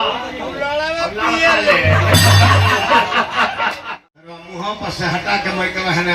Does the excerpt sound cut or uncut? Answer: cut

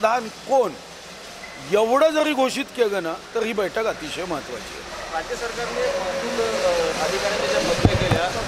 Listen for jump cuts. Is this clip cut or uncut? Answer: uncut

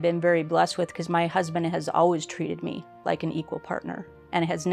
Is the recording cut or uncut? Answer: uncut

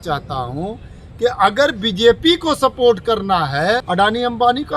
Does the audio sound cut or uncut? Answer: cut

